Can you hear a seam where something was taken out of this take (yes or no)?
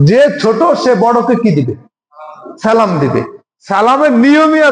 no